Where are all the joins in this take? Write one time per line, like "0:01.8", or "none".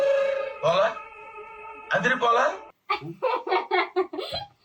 none